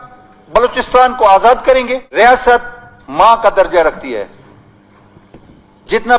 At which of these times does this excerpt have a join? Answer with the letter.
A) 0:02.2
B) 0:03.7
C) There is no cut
A